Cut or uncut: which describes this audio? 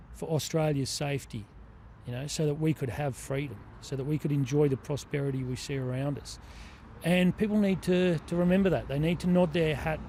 uncut